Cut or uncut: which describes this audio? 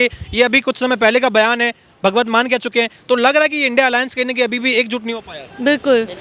uncut